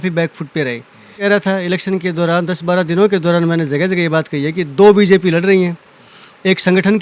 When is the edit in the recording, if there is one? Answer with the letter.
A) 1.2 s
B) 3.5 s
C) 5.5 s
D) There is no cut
A